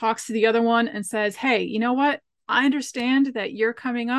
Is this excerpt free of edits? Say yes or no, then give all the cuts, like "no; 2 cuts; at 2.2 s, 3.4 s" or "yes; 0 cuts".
yes; 0 cuts